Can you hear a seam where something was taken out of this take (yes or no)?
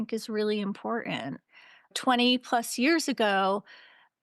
yes